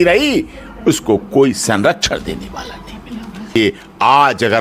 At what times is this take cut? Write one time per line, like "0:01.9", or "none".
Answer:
0:03.6